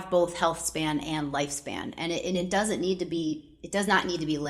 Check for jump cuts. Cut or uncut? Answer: uncut